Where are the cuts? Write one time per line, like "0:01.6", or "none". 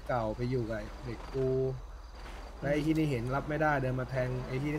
none

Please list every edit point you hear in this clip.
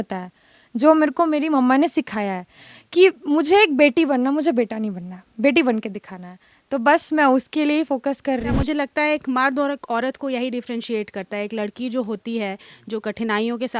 0:08.6

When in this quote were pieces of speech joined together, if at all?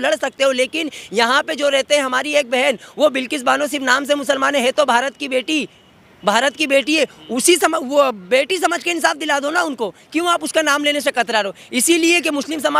none

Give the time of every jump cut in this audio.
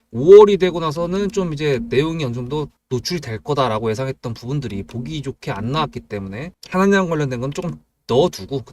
0:02.8
0:06.6

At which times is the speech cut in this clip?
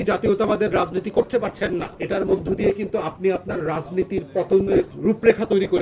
0:01.9
0:04.9

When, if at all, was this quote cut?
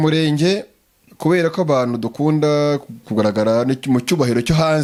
none

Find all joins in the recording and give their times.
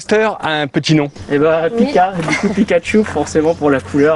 none

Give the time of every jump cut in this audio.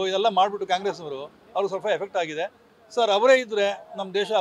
none

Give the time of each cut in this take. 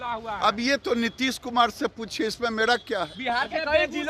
none

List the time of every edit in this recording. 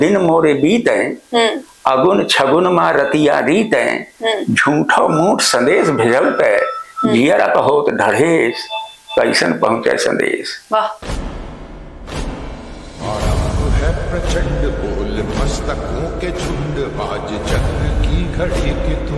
0:11.0

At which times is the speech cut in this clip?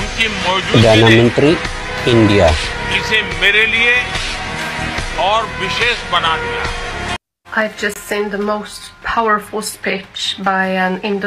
0:07.2

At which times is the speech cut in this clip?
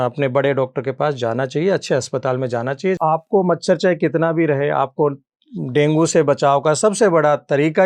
0:03.0

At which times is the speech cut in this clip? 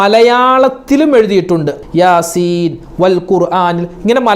0:01.7

